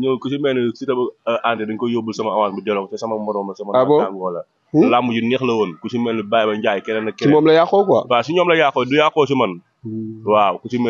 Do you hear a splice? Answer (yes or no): no